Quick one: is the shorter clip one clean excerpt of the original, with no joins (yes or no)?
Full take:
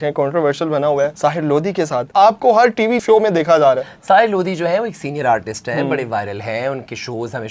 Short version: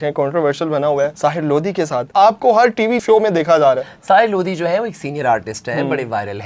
yes